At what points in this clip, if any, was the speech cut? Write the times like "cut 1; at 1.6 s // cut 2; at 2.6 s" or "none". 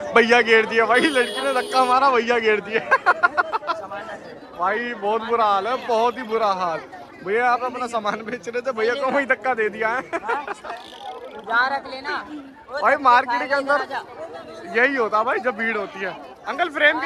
none

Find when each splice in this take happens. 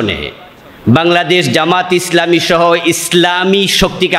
none

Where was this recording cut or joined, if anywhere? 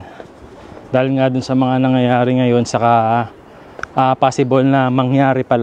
none

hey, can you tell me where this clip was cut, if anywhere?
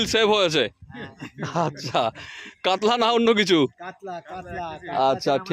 none

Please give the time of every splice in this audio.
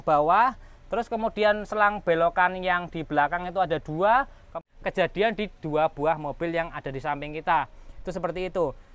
cut 1; at 4.6 s

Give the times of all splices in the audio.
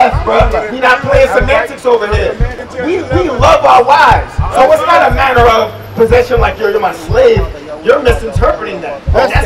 cut 1; at 2.6 s

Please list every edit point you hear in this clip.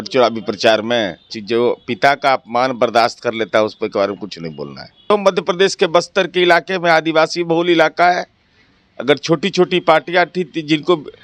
cut 1; at 1.4 s // cut 2; at 4.9 s

